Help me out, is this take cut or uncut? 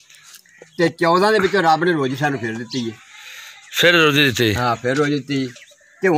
uncut